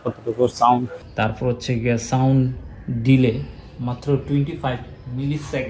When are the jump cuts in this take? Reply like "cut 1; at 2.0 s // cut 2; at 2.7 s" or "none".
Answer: cut 1; at 1.0 s

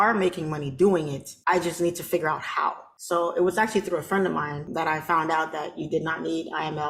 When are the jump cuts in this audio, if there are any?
cut 1; at 1.2 s // cut 2; at 2.9 s // cut 3; at 4.6 s

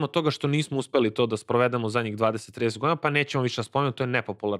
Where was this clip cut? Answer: none

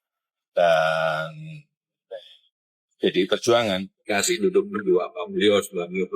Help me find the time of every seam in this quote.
cut 1; at 3.9 s

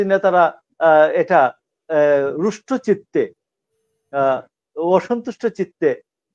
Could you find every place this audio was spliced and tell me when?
none

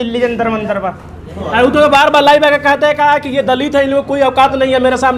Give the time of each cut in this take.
none

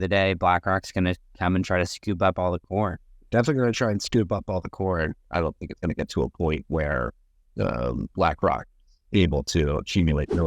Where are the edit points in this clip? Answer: cut 1; at 3.1 s // cut 2; at 5.3 s

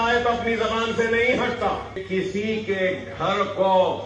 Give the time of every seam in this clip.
cut 1; at 2.0 s

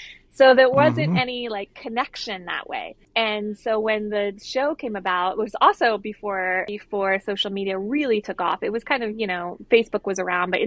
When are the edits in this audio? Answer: none

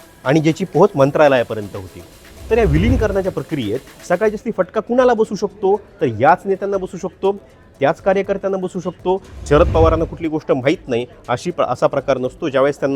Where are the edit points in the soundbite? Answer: cut 1; at 2.3 s // cut 2; at 9.3 s

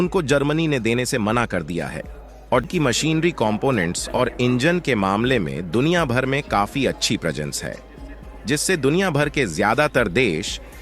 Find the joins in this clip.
cut 1; at 2.7 s

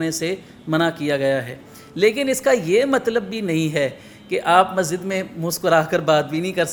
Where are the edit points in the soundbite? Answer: none

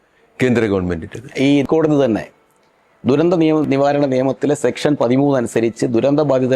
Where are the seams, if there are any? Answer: cut 1; at 1.7 s // cut 2; at 3.6 s

